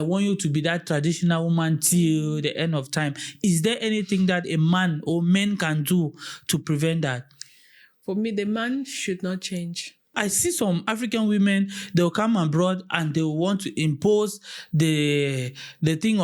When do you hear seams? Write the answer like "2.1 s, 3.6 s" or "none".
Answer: 10.1 s